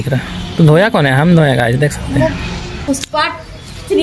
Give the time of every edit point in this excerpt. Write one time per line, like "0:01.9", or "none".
0:02.7